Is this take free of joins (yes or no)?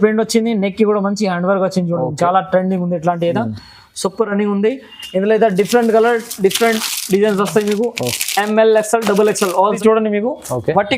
no